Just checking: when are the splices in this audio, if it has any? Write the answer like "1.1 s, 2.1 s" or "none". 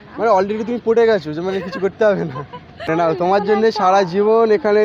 2.6 s